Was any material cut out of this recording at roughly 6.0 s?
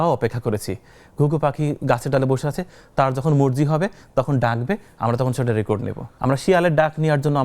yes; 1 cut; at 6.0 s

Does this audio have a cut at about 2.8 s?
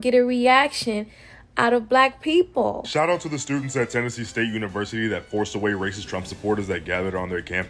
yes; 1 cut; at 2.8 s

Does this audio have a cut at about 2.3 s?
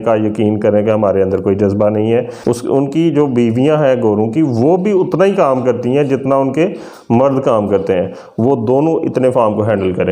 yes; 1 cut; at 2.3 s

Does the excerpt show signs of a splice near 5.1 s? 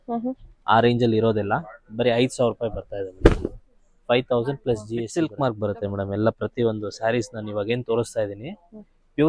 yes; 1 cut; at 5.1 s

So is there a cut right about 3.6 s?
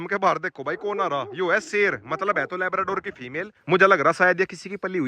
yes; 1 cut; at 3.6 s

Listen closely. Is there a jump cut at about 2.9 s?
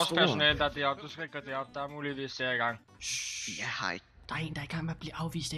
yes; 1 cut; at 2.9 s

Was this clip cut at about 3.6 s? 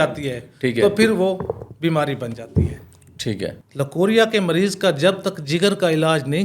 yes; 1 cut; at 3.6 s

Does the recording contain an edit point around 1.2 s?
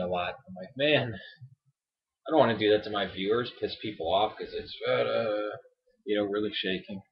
yes; 1 cut; at 1.2 s

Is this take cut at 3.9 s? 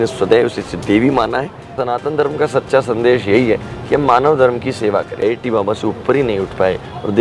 no; 2 cuts; at 1.7 s, 5.2 s

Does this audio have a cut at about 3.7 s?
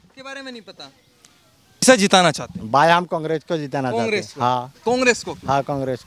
no; 1 cut; at 1.8 s

